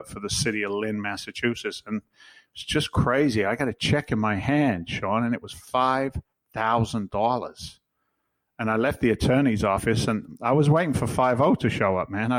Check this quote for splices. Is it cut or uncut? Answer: uncut